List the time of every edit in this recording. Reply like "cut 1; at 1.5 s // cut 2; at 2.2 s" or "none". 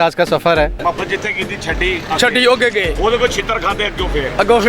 cut 1; at 0.8 s // cut 2; at 2.9 s